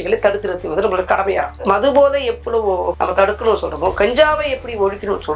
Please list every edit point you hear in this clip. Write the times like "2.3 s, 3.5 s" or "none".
1.7 s